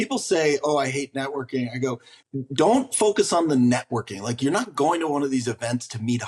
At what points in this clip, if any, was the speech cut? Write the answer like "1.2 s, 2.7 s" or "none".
2.1 s